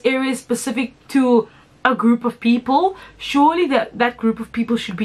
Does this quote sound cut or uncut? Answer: uncut